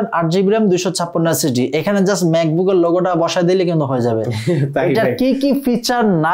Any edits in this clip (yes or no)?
no